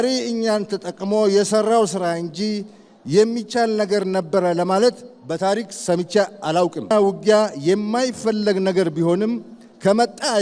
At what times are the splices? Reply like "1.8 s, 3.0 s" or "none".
6.9 s